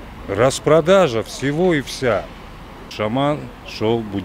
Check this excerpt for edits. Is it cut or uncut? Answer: cut